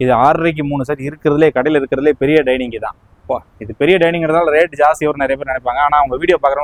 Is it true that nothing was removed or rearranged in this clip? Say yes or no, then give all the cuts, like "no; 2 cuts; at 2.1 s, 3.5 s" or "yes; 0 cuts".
yes; 0 cuts